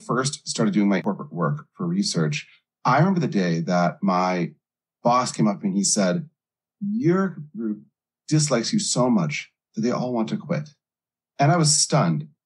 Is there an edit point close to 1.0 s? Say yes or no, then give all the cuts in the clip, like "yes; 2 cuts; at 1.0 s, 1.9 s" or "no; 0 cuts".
yes; 1 cut; at 1.0 s